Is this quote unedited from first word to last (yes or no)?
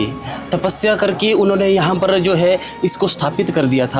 yes